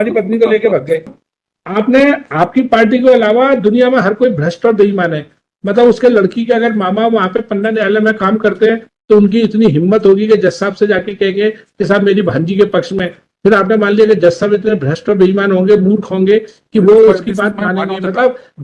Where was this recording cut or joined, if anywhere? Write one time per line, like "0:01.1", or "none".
0:01.1